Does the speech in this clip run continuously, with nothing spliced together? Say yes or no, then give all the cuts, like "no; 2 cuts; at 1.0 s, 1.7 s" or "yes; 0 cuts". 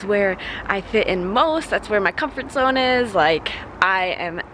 yes; 0 cuts